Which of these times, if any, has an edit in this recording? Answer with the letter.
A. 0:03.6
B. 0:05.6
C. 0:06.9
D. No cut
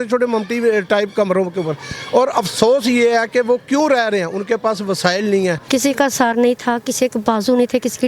B